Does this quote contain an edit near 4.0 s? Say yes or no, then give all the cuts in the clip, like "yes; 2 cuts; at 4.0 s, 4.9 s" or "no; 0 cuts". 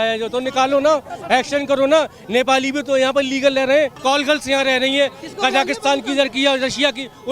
yes; 1 cut; at 4.0 s